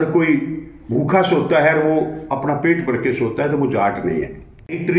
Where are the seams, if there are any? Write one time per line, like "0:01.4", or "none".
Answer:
none